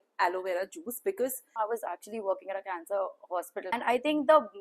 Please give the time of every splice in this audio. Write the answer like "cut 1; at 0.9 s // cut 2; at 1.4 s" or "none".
cut 1; at 1.5 s // cut 2; at 3.7 s